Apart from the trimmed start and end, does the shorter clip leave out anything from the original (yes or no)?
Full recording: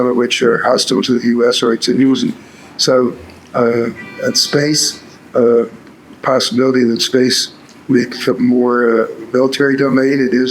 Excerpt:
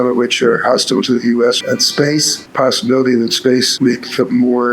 yes